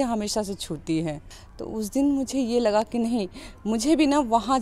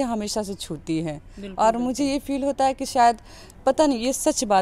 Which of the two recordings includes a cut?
second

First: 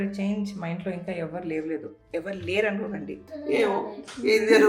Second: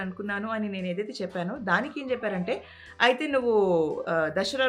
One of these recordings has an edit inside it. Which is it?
first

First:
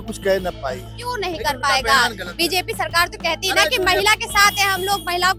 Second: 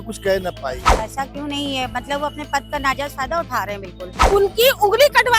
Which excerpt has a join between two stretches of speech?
second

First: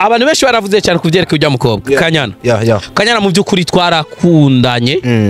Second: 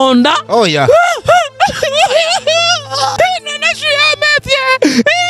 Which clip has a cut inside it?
second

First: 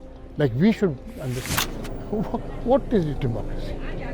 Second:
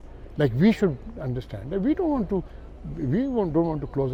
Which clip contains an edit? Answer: first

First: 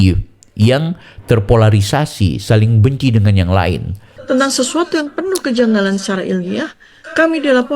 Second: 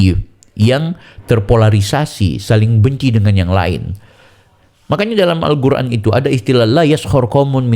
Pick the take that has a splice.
first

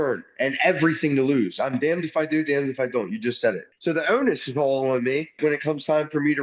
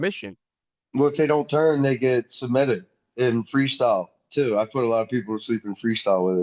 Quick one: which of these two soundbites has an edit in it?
first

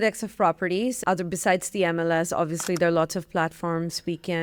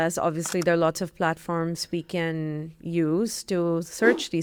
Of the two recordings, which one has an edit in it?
first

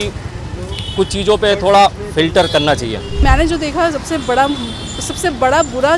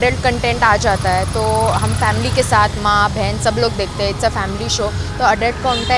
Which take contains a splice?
first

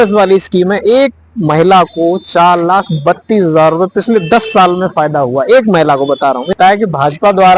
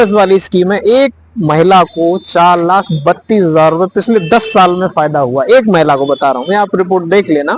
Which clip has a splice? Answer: first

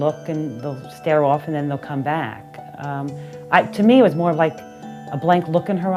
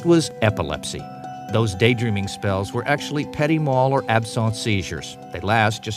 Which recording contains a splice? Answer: second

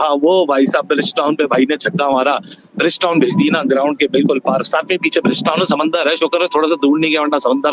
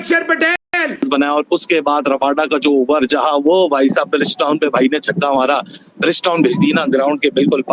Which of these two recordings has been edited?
second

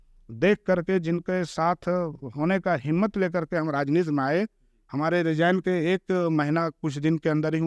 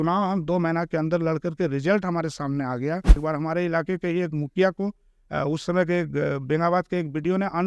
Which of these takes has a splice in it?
second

